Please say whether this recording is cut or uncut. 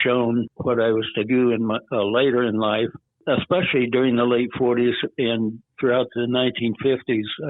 uncut